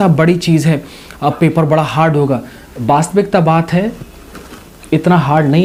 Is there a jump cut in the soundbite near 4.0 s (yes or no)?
no